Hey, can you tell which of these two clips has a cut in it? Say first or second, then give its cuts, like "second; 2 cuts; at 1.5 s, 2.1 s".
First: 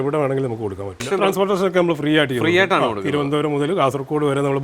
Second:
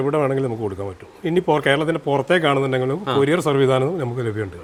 first; 1 cut; at 1.1 s